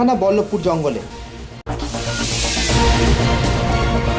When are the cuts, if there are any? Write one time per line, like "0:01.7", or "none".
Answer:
none